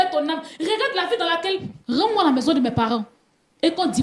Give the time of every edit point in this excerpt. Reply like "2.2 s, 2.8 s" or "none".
1.7 s